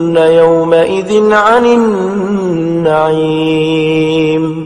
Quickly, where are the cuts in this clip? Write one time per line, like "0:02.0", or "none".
none